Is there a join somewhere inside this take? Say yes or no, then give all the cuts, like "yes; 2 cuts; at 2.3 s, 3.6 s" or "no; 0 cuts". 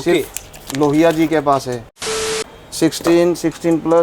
yes; 1 cut; at 2.3 s